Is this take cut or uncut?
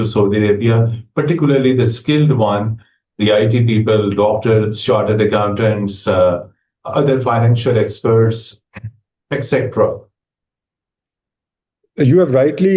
uncut